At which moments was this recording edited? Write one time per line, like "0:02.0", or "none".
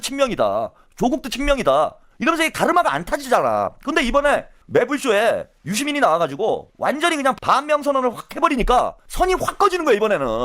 0:07.4
0:09.0